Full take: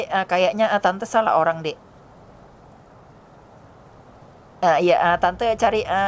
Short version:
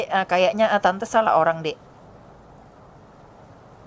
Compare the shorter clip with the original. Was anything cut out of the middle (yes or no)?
yes